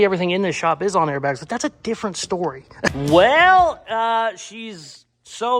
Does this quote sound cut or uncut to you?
cut